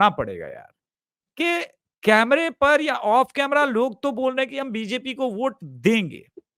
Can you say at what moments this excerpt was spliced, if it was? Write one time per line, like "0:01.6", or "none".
none